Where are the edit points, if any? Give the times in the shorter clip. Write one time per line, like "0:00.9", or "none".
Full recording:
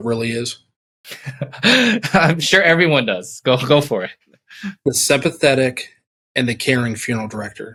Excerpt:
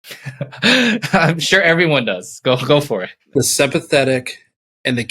0:03.2